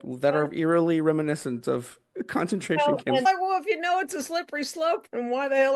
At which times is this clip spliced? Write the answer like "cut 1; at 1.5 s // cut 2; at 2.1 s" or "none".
cut 1; at 3.3 s